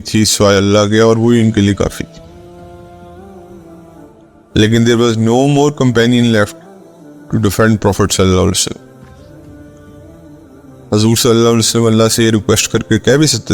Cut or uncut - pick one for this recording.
cut